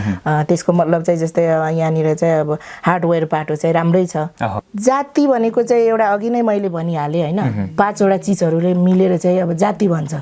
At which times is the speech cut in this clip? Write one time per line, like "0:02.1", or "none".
0:04.6